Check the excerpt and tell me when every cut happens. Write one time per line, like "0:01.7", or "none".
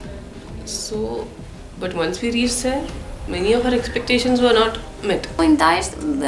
0:05.4